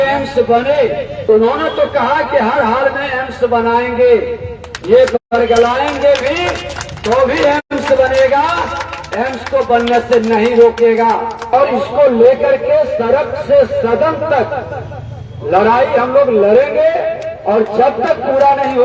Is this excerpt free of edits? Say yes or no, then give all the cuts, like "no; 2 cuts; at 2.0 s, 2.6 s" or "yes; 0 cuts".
no; 2 cuts; at 1.1 s, 11.5 s